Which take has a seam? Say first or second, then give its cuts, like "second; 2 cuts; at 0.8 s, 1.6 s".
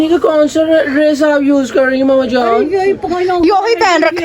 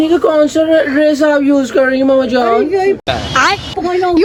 first; 1 cut; at 3.0 s